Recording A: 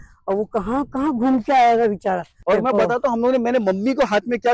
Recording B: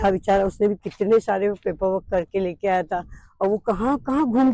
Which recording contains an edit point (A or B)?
A